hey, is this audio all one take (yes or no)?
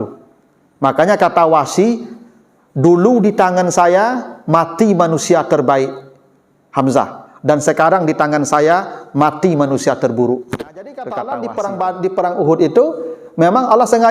no